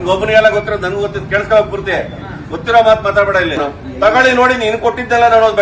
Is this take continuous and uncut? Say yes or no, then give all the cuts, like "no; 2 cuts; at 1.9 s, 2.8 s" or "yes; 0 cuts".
no; 1 cut; at 3.6 s